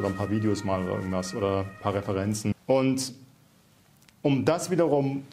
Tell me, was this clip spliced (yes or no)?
yes